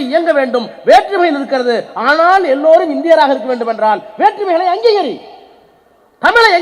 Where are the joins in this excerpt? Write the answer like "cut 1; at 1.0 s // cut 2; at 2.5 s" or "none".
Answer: none